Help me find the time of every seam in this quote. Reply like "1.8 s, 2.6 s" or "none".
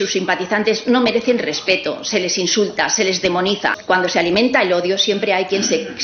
3.8 s